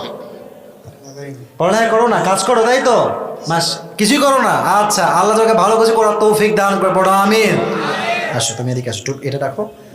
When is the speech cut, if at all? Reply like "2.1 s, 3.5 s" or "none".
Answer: 8.2 s

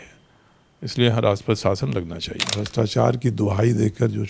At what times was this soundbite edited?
2.6 s

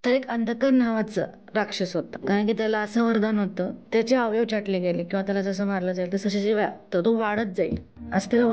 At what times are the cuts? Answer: 2.2 s, 3.8 s

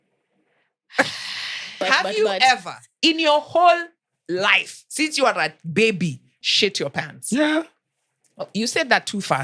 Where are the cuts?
1.8 s, 6.3 s

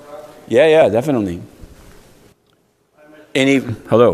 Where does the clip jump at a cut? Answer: 2.4 s

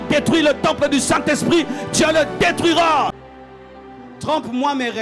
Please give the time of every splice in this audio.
3.3 s

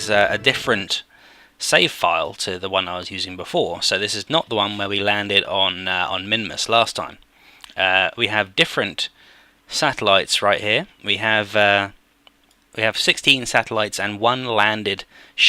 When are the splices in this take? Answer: 9.9 s

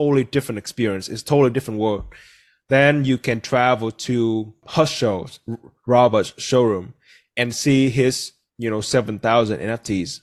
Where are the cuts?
4.6 s

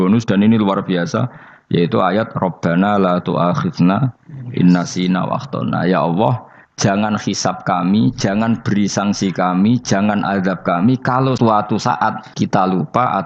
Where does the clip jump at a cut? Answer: 11.4 s, 12.2 s

